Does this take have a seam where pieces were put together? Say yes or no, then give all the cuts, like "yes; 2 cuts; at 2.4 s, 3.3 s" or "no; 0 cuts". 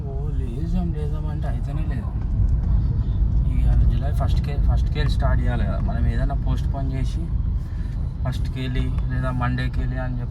no; 0 cuts